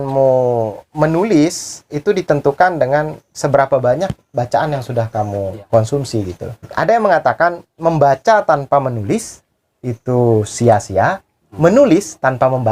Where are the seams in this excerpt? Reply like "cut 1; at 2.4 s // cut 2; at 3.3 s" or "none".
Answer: cut 1; at 5.6 s // cut 2; at 6.7 s